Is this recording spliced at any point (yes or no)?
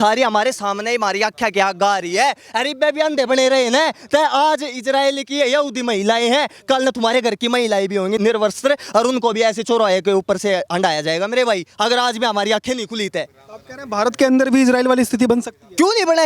yes